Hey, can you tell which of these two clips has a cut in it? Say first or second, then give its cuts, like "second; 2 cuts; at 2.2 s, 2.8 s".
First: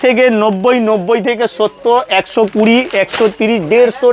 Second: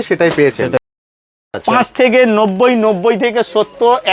second; 1 cut; at 1.0 s